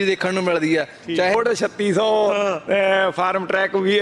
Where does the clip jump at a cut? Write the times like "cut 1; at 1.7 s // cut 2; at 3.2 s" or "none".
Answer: cut 1; at 1.4 s